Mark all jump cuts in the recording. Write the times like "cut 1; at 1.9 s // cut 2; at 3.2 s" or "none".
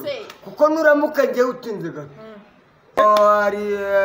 cut 1; at 3.0 s